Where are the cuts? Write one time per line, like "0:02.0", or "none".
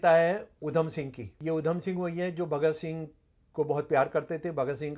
0:01.2